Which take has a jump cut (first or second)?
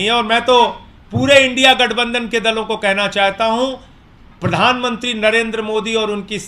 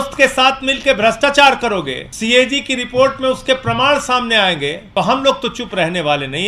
second